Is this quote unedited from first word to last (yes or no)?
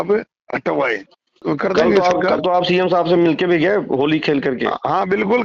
no